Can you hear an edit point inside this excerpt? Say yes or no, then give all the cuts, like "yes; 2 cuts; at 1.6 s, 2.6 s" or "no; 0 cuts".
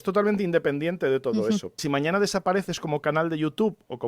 yes; 1 cut; at 1.7 s